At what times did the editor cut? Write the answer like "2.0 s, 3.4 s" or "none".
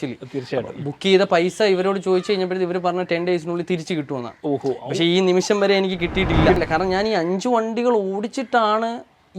6.6 s